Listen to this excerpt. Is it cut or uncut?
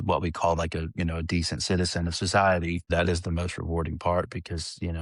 cut